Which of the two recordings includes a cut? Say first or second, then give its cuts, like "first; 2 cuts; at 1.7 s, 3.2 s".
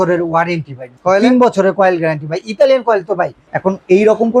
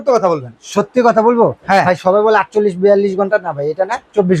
first; 2 cuts; at 0.9 s, 3.5 s